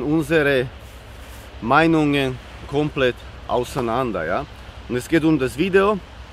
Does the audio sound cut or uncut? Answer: uncut